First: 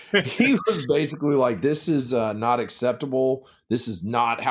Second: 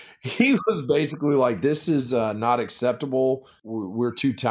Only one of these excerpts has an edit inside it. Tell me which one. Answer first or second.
second